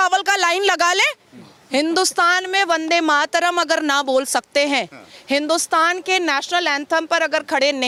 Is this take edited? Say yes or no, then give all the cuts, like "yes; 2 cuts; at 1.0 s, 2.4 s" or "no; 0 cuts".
no; 0 cuts